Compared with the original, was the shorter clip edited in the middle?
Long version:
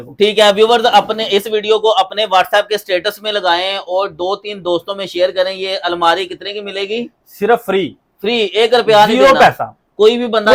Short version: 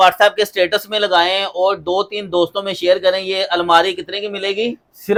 no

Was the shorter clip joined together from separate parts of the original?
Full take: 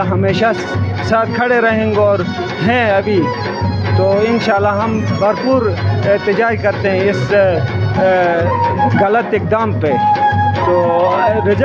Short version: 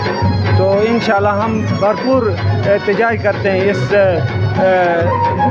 no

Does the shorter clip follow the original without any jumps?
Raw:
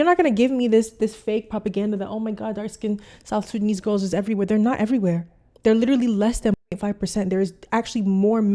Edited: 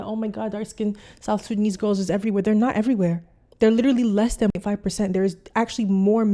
no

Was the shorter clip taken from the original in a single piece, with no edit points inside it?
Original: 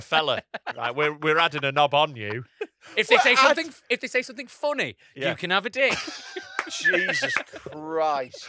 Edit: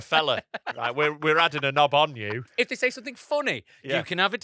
no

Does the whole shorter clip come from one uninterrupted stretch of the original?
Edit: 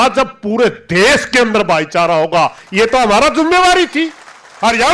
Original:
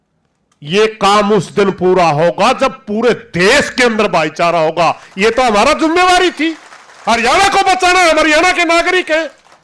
yes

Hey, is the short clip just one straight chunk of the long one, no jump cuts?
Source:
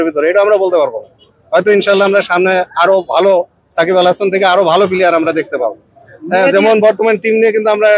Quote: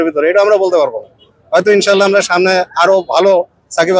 yes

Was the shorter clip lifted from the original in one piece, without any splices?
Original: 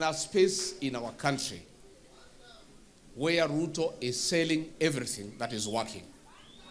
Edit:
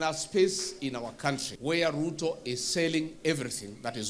no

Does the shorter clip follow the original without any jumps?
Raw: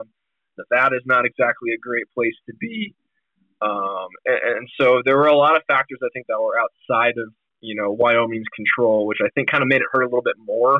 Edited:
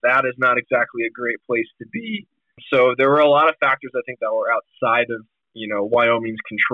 no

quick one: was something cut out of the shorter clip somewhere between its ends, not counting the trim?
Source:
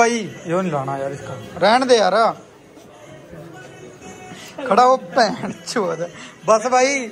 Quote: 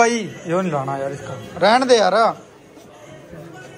no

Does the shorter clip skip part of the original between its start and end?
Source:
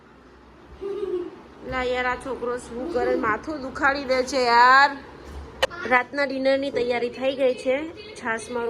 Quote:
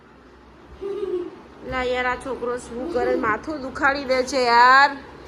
no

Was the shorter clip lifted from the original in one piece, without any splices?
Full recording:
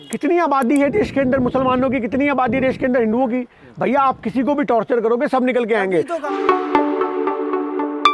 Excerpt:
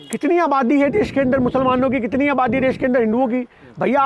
yes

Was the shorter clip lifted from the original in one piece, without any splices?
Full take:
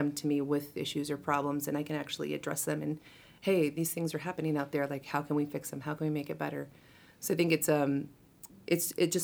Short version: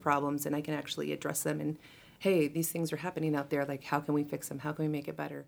yes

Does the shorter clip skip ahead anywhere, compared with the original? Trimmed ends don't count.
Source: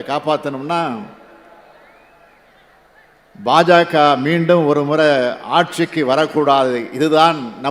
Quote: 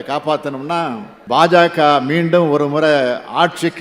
yes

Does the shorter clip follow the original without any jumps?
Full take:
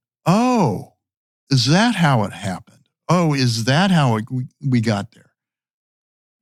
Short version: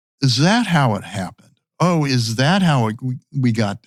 yes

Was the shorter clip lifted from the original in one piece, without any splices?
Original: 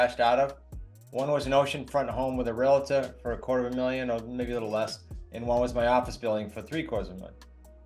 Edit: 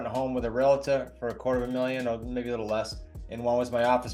yes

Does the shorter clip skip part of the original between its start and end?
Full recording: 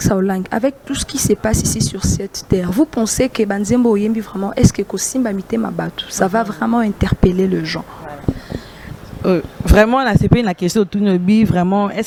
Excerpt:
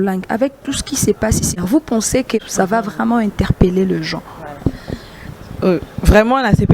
yes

